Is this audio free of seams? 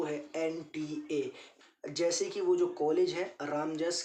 no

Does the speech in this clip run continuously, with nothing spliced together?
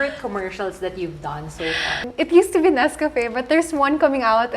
no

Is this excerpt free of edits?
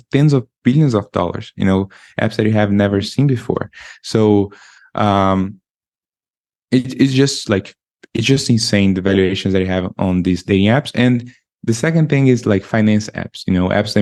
yes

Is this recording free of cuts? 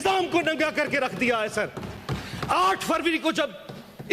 yes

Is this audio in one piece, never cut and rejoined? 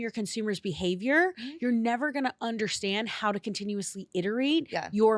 yes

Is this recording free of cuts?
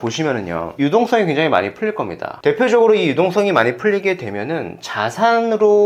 no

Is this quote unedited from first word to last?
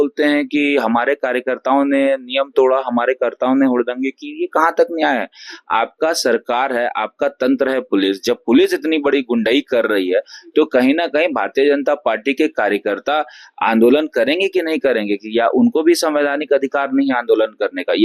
yes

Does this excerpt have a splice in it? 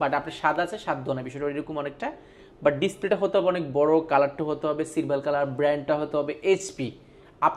no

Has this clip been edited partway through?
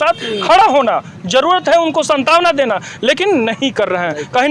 no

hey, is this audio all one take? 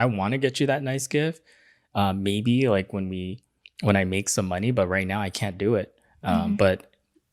yes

